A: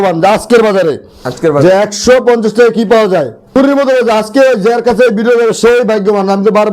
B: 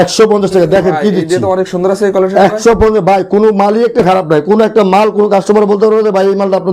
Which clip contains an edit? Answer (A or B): A